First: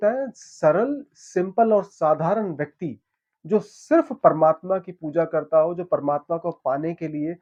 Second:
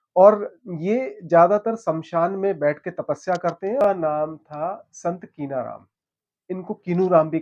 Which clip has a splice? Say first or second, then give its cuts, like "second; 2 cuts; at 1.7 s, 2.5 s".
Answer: second; 1 cut; at 3.8 s